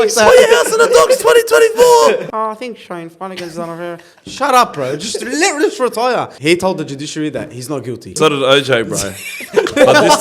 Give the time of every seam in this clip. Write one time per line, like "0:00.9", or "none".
0:02.3
0:06.3
0:08.1